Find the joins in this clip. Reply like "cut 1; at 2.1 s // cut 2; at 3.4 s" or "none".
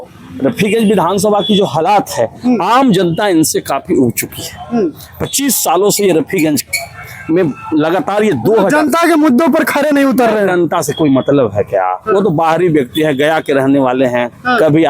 none